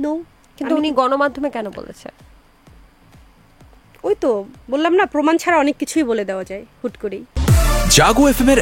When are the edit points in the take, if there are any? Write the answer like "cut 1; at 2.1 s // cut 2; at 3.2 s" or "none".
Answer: cut 1; at 7.3 s